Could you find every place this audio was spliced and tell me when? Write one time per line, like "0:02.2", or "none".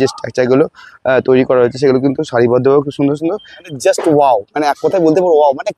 0:03.5